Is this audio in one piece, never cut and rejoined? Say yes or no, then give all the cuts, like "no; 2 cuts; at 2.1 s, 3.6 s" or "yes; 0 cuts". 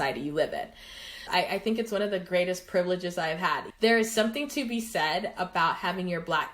no; 2 cuts; at 1.2 s, 3.7 s